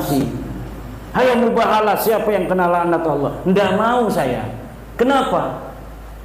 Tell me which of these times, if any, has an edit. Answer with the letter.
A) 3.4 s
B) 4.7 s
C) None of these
C